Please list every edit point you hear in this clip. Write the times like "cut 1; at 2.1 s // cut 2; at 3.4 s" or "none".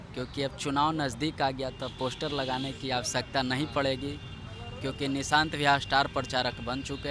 none